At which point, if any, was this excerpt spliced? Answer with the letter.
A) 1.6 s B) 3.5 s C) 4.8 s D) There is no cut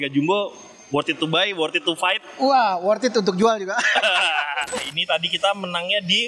C